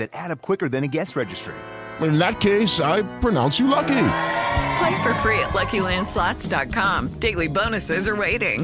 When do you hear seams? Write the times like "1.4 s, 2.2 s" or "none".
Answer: none